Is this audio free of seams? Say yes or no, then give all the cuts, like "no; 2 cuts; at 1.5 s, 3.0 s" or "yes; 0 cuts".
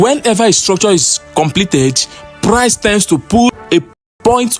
no; 1 cut; at 3.6 s